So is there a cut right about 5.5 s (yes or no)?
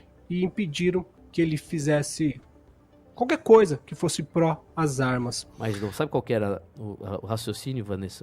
yes